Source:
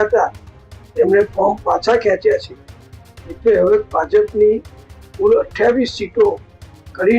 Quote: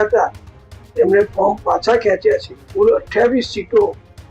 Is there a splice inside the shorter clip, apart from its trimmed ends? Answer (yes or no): yes